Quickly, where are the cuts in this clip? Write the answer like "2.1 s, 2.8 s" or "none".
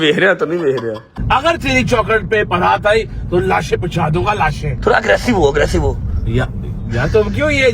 1.1 s